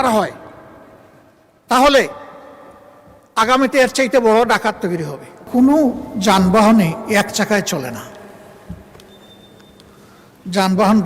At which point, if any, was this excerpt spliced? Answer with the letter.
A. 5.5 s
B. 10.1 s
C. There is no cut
A